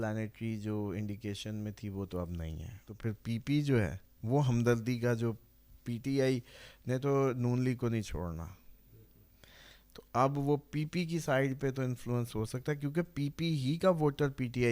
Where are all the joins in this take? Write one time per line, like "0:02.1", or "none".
0:02.9